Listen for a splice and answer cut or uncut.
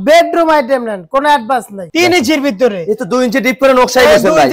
cut